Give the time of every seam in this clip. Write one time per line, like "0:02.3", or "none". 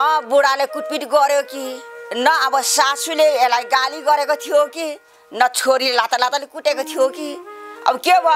none